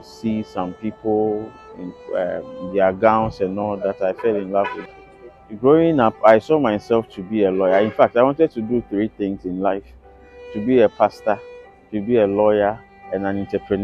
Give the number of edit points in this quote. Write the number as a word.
one